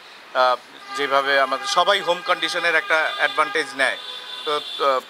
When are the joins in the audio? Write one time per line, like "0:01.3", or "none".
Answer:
none

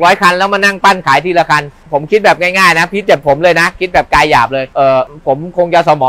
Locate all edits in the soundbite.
0:01.8
0:04.7

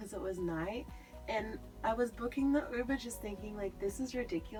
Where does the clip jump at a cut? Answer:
none

